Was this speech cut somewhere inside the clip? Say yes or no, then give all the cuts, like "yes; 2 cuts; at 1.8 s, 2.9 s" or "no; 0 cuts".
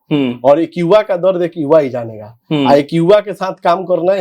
no; 0 cuts